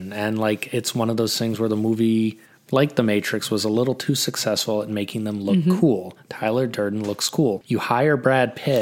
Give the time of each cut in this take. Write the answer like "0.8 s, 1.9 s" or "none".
none